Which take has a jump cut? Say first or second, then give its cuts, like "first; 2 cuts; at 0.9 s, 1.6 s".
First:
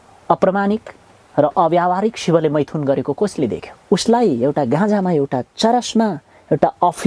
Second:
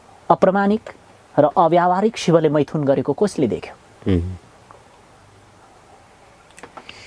first; 1 cut; at 3.7 s